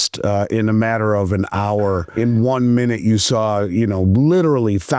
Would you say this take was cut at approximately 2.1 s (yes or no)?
yes